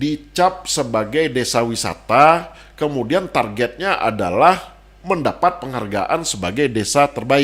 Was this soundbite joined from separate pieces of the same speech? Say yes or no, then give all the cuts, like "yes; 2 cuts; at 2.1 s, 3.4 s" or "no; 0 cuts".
no; 0 cuts